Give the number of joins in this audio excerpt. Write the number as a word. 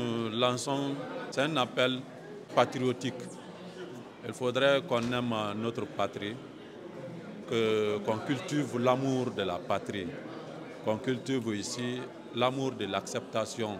two